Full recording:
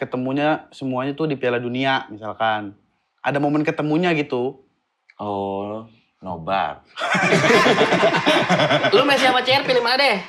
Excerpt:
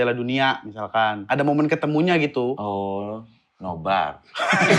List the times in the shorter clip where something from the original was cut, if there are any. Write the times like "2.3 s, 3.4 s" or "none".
1.2 s, 2.6 s